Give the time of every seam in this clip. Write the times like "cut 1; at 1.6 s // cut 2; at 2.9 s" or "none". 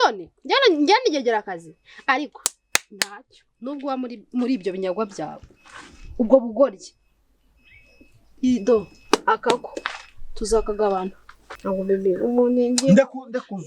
cut 1; at 11.5 s

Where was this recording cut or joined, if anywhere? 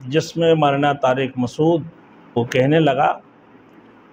cut 1; at 2.4 s

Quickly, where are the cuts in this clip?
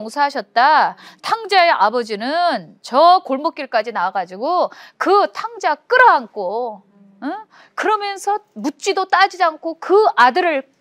none

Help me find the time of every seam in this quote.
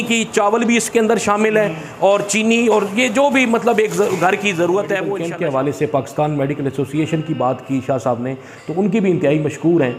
cut 1; at 5.2 s

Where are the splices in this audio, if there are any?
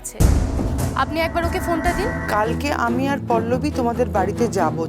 cut 1; at 2.2 s

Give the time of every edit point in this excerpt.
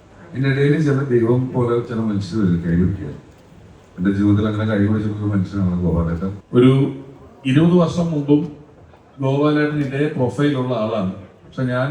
cut 1; at 6.4 s

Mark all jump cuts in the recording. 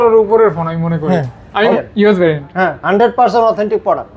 cut 1; at 1.8 s

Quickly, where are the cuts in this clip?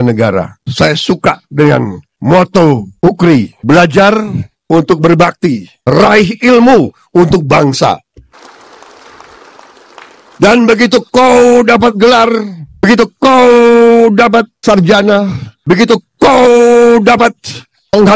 none

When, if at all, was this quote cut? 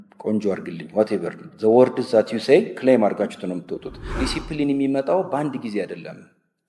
cut 1; at 4.2 s

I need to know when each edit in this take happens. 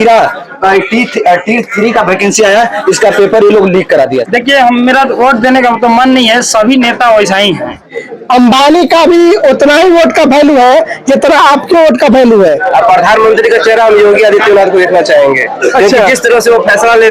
cut 1; at 4.2 s // cut 2; at 7.9 s // cut 3; at 12.5 s

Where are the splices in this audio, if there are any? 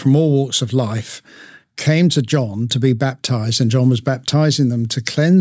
none

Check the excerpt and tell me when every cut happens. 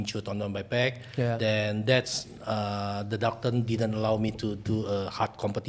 none

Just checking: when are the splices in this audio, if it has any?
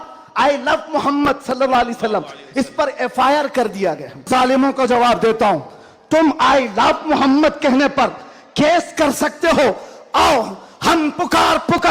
cut 1; at 4.3 s

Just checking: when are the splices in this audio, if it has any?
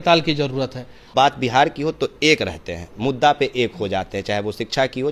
cut 1; at 1.1 s

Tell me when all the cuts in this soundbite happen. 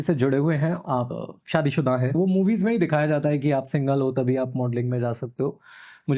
cut 1; at 1.0 s // cut 2; at 2.1 s

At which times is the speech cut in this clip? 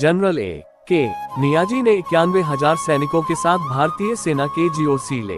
cut 1; at 1.3 s

